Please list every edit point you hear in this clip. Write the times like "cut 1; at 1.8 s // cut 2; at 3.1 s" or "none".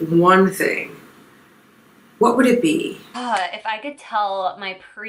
cut 1; at 3.0 s